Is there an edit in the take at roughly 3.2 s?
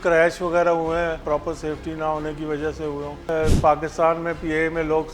yes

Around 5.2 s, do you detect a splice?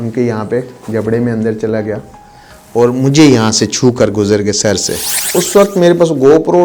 yes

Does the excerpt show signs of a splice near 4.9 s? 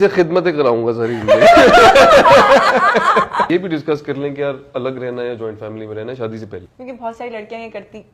no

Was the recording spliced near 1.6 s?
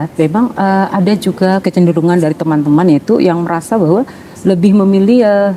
yes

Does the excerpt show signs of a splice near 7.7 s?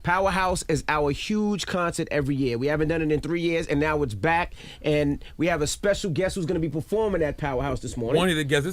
yes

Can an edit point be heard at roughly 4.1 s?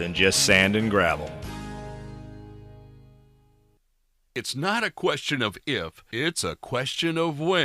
yes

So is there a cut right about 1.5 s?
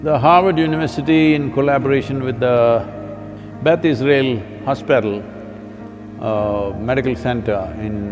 no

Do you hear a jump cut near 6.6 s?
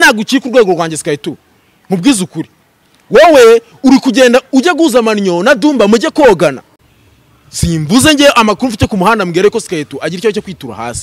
yes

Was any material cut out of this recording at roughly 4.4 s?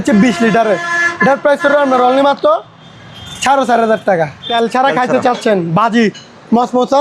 yes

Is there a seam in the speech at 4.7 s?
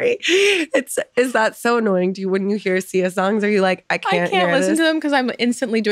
no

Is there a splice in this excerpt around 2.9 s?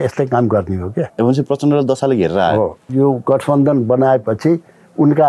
yes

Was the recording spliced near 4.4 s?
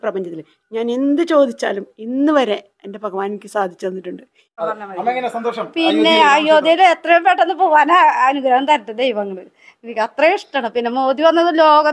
yes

